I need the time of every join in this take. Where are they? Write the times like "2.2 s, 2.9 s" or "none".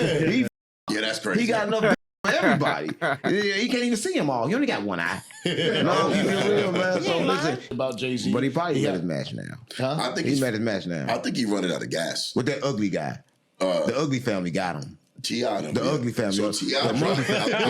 7.6 s